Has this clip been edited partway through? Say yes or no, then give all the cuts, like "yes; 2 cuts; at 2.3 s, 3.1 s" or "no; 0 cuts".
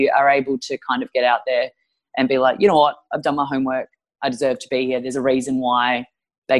no; 0 cuts